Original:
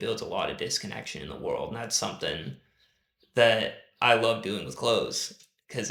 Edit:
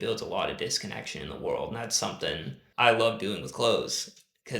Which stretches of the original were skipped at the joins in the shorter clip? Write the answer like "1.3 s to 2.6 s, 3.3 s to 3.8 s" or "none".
2.6 s to 3.8 s